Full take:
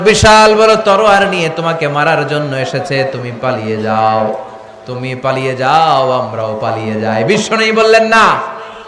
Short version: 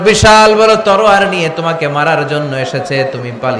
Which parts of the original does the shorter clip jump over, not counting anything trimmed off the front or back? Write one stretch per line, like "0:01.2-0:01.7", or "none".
none